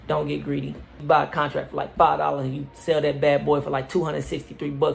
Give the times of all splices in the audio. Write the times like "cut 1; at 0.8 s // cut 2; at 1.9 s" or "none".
cut 1; at 1.0 s

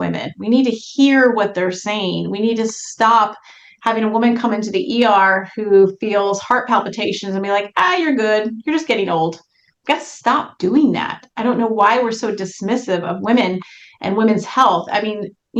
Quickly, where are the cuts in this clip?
none

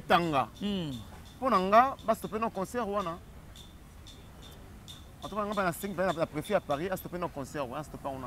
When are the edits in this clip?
none

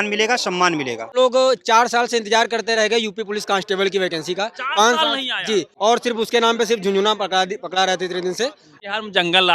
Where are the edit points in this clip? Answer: cut 1; at 1.1 s // cut 2; at 5.7 s // cut 3; at 8.7 s

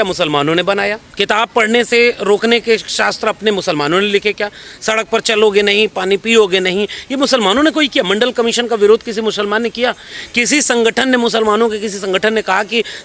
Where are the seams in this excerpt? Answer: cut 1; at 1.0 s

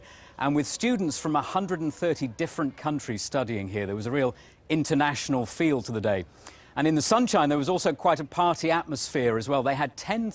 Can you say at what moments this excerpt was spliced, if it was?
cut 1; at 9.4 s

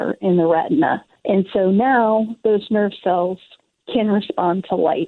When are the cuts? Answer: cut 1; at 1.1 s

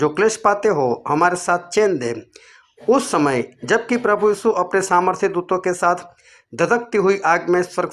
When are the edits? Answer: none

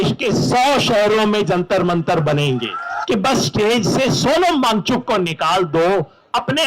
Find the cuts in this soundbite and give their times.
cut 1; at 2.9 s

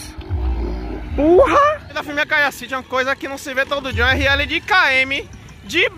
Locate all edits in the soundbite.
cut 1; at 1.9 s

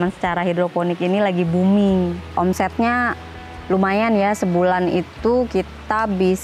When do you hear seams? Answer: cut 1; at 2.2 s

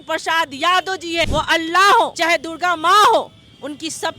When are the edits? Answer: cut 1; at 1.3 s // cut 2; at 2.2 s

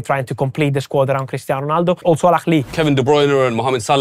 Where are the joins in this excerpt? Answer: cut 1; at 2.0 s // cut 2; at 2.7 s

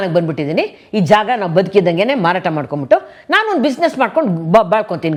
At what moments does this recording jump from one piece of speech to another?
none

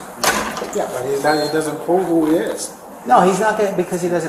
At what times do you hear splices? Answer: none

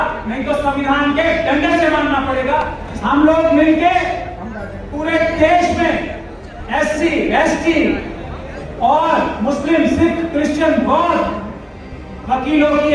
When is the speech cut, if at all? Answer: cut 1; at 2.8 s

